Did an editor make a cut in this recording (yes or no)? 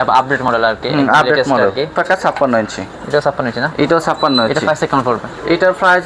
yes